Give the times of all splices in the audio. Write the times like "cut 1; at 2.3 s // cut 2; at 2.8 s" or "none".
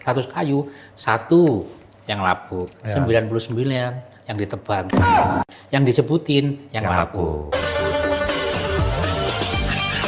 none

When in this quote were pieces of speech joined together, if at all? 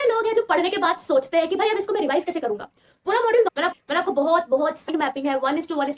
cut 1; at 3.5 s // cut 2; at 4.9 s

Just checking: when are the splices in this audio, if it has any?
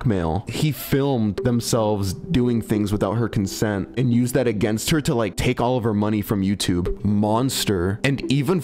cut 1; at 6.9 s

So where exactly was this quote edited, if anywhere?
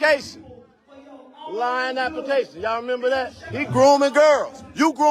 cut 1; at 3.4 s

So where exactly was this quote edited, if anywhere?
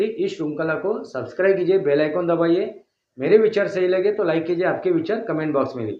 none

